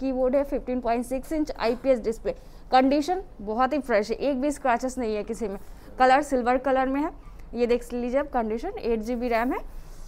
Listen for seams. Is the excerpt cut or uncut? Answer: uncut